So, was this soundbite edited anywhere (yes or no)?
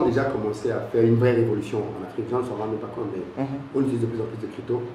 no